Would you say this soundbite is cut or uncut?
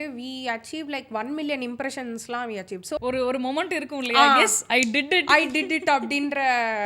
cut